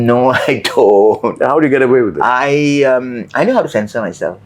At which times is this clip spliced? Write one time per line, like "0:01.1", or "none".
none